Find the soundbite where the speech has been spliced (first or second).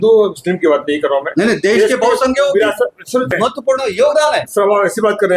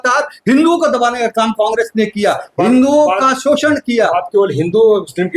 first